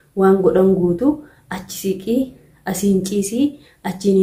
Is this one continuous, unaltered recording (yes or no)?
yes